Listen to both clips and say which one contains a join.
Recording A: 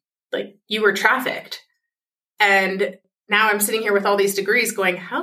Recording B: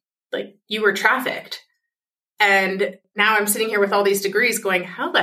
B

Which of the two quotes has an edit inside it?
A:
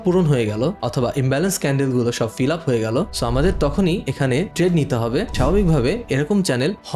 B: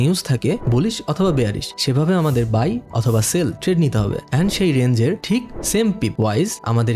A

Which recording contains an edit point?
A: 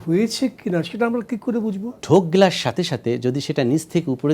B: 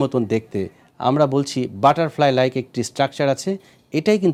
A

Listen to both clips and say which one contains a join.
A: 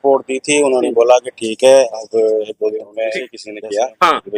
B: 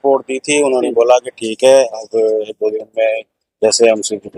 A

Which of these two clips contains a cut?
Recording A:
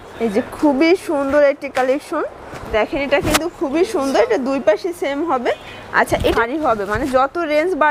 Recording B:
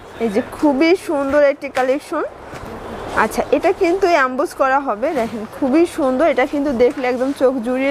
A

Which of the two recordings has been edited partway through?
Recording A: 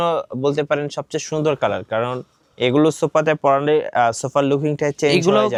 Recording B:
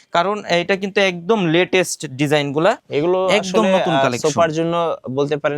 B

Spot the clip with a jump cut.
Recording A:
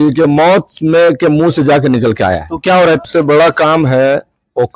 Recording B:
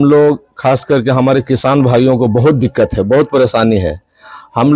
A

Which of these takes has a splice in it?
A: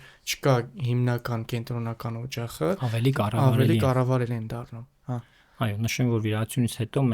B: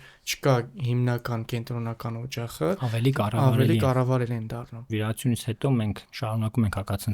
B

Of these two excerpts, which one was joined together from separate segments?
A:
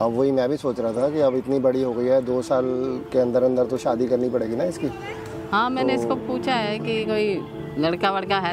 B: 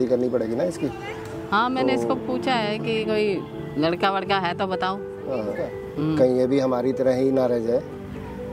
B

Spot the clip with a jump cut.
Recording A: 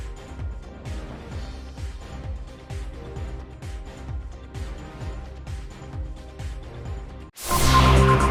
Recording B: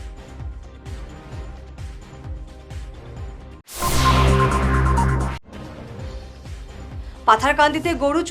B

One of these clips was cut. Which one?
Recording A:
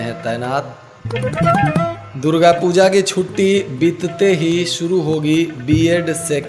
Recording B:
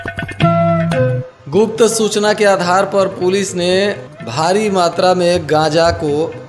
B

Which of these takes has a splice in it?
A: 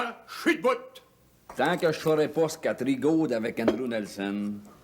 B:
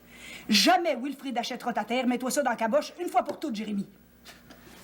A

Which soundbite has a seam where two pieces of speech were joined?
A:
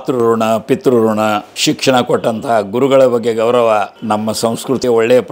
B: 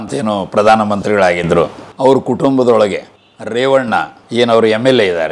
A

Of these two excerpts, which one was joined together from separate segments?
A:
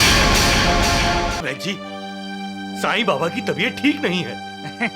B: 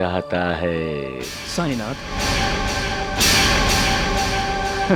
A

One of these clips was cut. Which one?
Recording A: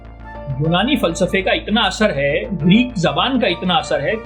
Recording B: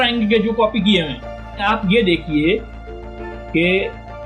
B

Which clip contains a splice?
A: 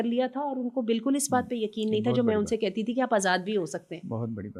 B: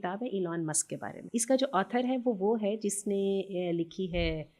B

